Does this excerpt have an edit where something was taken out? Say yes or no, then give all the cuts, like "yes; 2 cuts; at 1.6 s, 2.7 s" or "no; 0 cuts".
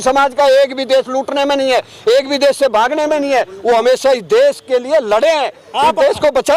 no; 0 cuts